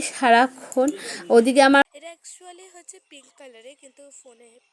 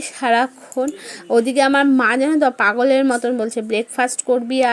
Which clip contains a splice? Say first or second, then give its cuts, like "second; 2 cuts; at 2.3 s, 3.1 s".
first; 1 cut; at 1.8 s